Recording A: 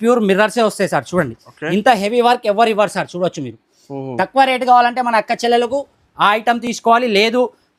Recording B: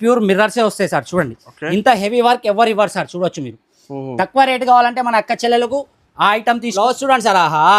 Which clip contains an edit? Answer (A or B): B